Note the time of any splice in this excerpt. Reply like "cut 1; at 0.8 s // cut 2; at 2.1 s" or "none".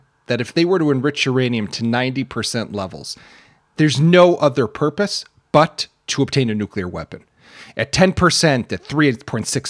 cut 1; at 6.1 s